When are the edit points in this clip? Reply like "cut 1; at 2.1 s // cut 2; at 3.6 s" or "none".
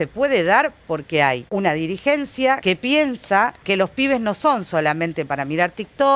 cut 1; at 1.4 s // cut 2; at 2.6 s // cut 3; at 3.6 s